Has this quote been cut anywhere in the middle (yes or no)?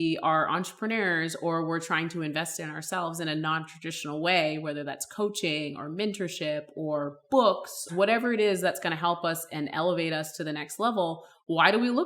yes